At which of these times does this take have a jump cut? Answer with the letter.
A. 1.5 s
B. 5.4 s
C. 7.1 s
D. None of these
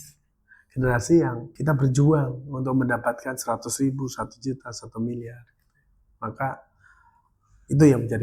A